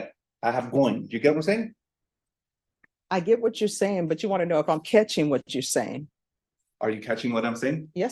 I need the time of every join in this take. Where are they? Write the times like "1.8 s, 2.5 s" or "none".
none